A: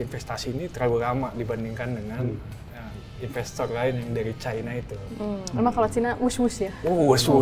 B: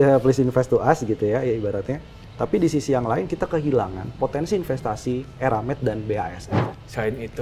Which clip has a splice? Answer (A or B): B